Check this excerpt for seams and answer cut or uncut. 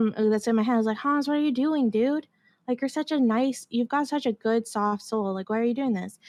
uncut